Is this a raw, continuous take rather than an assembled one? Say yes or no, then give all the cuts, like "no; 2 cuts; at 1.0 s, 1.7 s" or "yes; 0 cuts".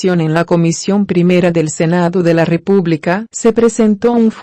no; 1 cut; at 3.3 s